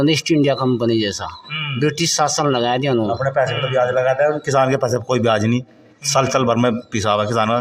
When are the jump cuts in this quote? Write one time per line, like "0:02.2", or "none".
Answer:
none

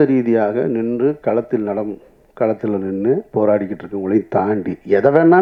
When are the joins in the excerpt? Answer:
none

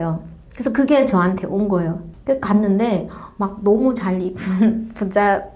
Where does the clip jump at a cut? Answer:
0:02.1

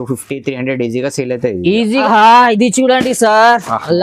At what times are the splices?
0:02.0

